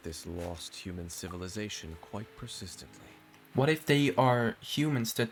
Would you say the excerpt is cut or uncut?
uncut